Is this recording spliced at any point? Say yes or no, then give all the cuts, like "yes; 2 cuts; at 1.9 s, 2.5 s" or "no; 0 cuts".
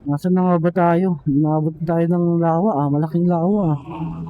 no; 0 cuts